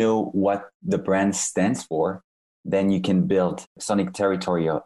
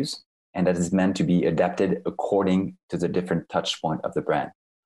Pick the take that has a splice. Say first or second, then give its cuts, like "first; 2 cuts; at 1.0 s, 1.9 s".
first; 1 cut; at 3.7 s